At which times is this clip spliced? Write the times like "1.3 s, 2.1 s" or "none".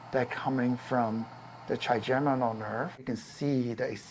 3.0 s